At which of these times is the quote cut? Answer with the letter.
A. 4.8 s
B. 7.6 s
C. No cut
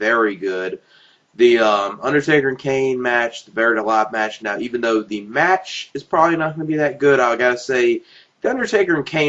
B